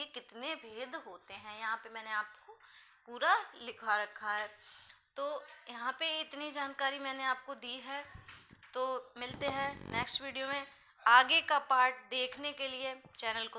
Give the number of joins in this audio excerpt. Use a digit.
0